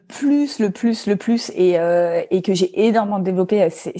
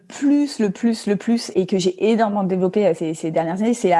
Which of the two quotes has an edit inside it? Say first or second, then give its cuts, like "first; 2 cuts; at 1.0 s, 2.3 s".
second; 2 cuts; at 1.5 s, 3.1 s